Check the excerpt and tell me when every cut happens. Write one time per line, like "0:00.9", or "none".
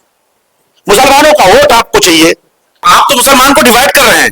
0:02.9